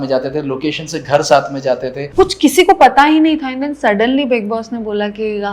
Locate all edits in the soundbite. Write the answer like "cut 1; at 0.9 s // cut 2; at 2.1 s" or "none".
cut 1; at 2.0 s